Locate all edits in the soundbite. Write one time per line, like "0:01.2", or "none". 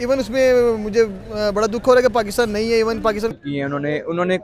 0:03.4